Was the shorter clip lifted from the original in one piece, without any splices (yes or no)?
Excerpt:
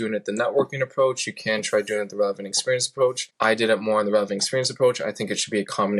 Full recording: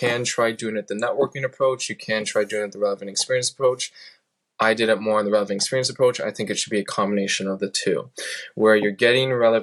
no